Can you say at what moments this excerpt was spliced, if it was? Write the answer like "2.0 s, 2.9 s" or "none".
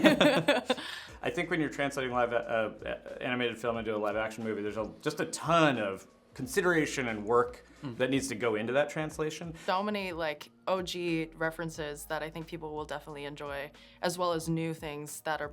1.1 s, 9.6 s